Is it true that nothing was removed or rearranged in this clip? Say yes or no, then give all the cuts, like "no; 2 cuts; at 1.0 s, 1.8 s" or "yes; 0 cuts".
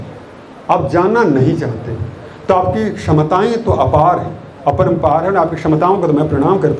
yes; 0 cuts